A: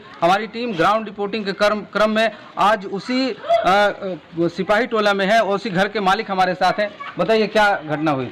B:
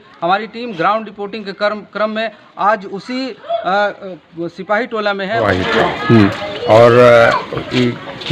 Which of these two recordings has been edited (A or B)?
B